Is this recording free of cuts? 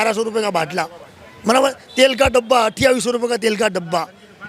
yes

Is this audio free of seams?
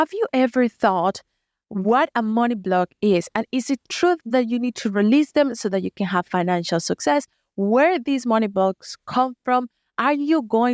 yes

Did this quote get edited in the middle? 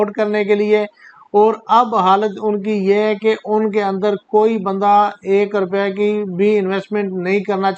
no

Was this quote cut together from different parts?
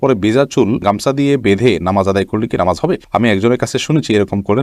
no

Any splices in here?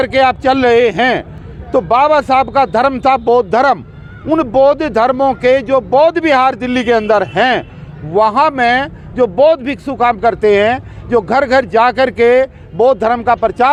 no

